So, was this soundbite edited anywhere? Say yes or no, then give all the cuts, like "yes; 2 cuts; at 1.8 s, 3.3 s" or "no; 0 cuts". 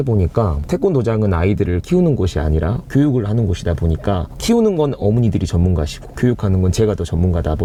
no; 0 cuts